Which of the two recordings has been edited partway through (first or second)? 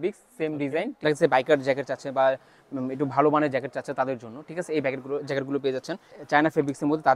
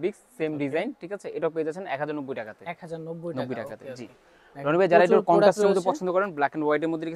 first